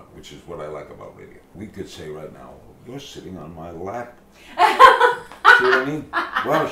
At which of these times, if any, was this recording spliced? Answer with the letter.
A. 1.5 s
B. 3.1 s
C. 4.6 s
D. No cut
A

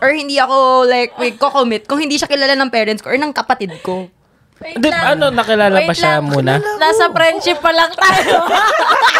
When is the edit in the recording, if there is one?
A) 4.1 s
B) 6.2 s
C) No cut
C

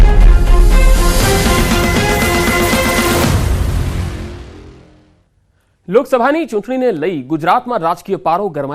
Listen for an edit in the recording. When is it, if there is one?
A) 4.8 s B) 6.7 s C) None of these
B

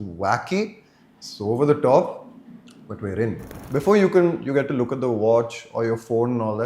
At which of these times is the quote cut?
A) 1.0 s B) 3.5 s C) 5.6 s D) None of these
B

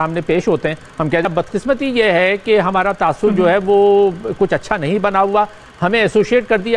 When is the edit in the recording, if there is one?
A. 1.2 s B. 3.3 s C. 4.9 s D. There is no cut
A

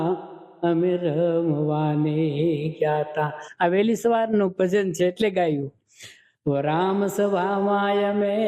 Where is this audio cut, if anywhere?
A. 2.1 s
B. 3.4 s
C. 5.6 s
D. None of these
D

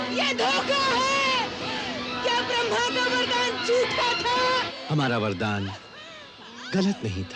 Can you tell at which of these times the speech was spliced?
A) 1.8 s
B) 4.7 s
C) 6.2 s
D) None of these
B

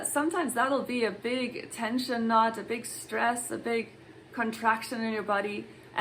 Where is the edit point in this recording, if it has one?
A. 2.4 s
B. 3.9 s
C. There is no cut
C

